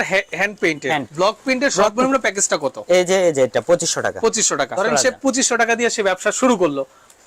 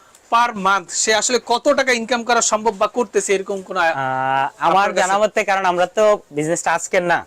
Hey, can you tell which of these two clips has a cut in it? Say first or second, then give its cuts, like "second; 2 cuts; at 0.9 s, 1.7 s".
first; 2 cuts; at 1.1 s, 4.7 s